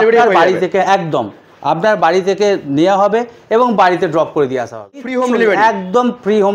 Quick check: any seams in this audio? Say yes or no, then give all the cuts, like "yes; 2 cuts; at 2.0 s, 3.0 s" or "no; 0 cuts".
yes; 1 cut; at 5.1 s